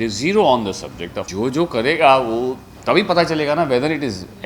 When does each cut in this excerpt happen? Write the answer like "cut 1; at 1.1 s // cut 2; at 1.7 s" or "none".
cut 1; at 1.2 s